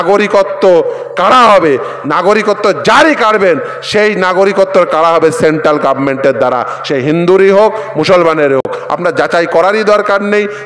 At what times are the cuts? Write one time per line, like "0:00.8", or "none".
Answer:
none